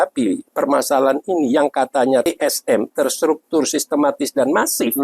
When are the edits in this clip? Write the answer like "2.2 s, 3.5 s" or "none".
2.2 s

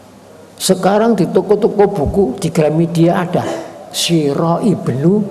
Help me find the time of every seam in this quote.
none

